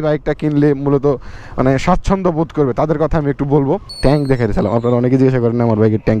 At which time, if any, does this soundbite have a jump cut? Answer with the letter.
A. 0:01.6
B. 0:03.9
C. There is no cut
B